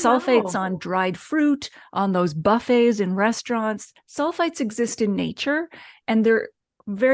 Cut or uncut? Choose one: uncut